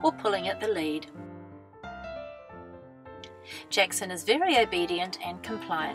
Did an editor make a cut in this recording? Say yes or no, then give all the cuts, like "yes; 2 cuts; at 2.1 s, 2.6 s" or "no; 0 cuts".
yes; 1 cut; at 4.5 s